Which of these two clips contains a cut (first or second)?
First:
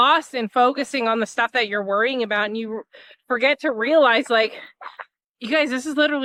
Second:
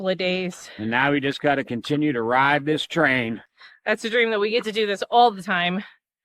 second